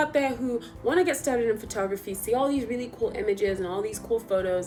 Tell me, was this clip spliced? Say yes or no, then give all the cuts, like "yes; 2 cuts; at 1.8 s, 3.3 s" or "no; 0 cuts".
no; 0 cuts